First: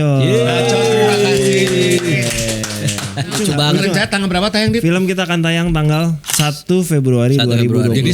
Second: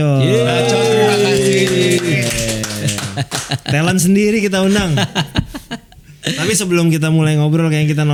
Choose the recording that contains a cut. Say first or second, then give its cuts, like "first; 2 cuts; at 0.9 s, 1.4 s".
first; 1 cut; at 3.3 s